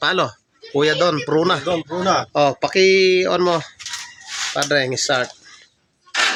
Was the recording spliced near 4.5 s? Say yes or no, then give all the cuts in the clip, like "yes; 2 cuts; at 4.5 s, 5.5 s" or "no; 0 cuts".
no; 0 cuts